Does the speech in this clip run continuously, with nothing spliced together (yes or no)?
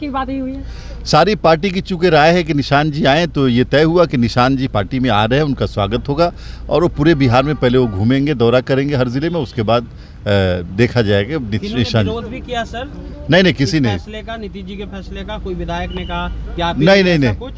yes